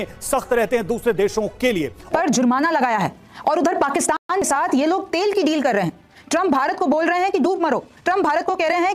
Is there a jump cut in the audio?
yes; 1 cut; at 2.1 s

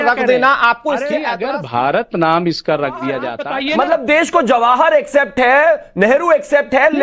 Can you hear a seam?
yes; 2 cuts; at 1.3 s, 3.3 s

